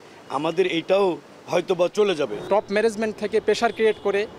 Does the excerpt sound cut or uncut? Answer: cut